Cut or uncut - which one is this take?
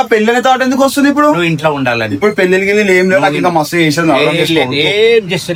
uncut